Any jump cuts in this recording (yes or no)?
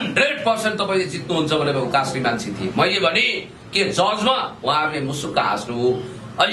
no